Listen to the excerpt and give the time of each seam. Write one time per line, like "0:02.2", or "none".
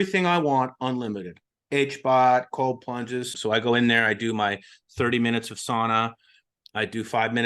0:03.3